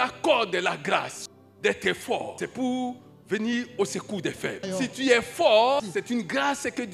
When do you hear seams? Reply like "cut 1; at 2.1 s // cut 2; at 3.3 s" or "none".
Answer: cut 1; at 1.2 s // cut 2; at 2.3 s // cut 3; at 4.6 s // cut 4; at 5.8 s